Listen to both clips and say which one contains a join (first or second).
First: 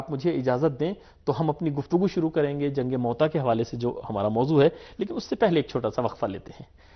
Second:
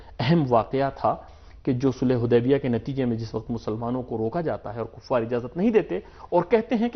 second